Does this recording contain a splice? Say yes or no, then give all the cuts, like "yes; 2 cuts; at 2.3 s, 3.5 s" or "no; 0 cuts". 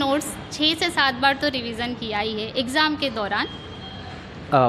no; 0 cuts